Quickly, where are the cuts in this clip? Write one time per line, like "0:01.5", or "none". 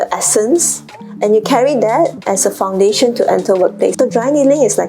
0:03.9